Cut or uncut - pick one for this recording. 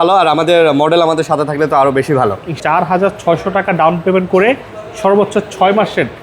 cut